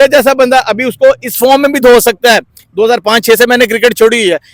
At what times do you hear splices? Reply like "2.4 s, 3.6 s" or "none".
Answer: none